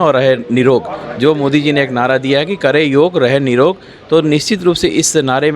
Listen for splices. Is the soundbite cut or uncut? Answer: uncut